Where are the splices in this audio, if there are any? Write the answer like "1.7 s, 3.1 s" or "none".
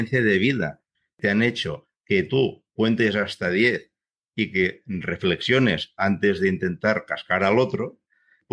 1.1 s, 2.7 s